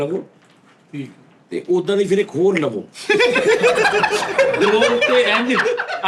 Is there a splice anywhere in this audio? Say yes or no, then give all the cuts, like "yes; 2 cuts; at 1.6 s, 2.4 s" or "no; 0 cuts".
no; 0 cuts